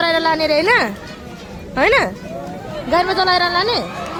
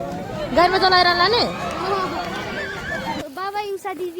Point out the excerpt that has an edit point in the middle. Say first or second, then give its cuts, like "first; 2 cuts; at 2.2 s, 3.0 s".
second; 1 cut; at 3.2 s